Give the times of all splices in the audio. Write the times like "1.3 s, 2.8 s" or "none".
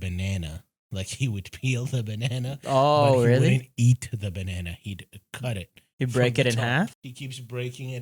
6.9 s

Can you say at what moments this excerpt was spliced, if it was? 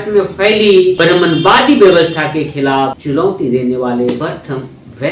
1.0 s, 3.0 s, 4.2 s

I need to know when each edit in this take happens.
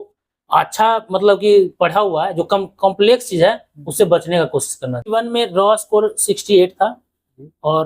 5.1 s

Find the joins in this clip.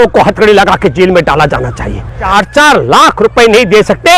2.3 s

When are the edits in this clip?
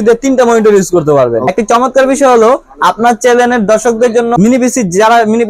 1.5 s, 4.3 s

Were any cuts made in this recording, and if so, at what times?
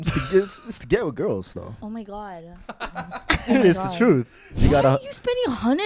1.7 s, 4.6 s

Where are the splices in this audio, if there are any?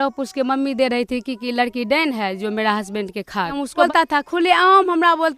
3.8 s

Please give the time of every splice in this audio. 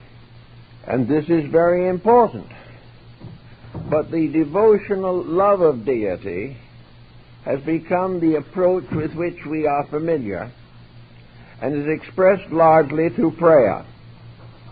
6.4 s

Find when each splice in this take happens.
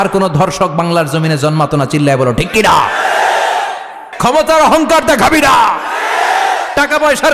4.1 s

